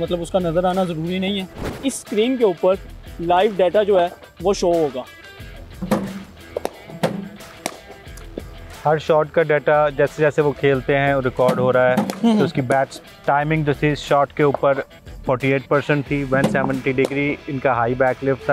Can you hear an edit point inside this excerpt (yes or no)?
yes